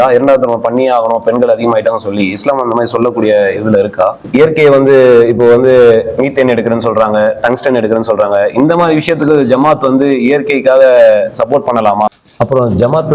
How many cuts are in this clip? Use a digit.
2